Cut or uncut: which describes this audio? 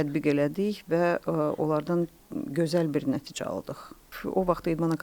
cut